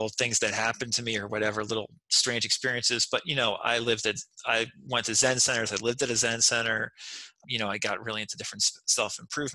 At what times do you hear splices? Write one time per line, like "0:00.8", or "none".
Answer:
0:07.4